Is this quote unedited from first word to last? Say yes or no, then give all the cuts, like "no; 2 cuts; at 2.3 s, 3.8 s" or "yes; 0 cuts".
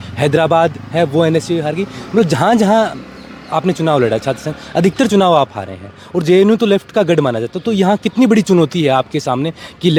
yes; 0 cuts